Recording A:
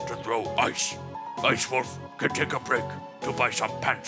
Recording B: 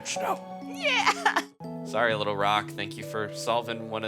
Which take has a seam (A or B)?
B